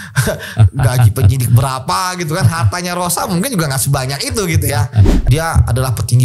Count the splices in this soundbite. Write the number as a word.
one